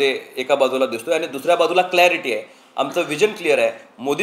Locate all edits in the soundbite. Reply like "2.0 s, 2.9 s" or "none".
none